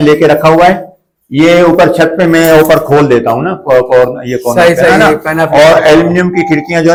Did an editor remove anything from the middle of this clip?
no; 0 cuts

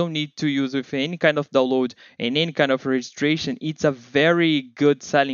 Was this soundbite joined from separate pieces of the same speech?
no; 0 cuts

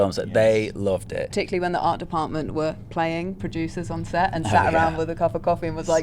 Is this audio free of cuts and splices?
no; 1 cut; at 1.3 s

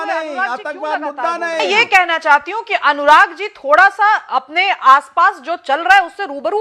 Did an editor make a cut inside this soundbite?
yes; 1 cut; at 1.7 s

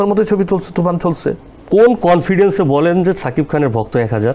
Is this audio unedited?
no; 1 cut; at 1.5 s

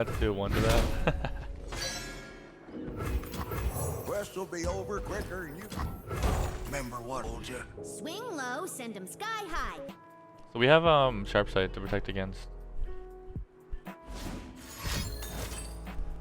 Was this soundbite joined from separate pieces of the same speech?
yes; 3 cuts; at 5.6 s, 7.2 s, 9.9 s

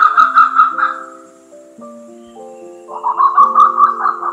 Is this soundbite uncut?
yes; 0 cuts

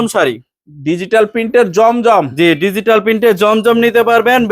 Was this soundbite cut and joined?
no; 0 cuts

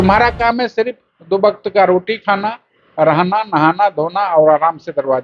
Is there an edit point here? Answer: no; 0 cuts

